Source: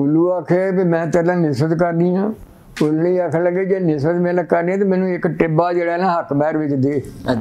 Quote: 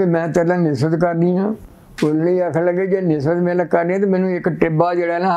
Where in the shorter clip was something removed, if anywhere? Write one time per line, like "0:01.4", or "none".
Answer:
none